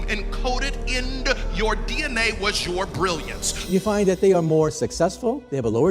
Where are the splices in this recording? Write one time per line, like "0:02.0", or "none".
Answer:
0:03.7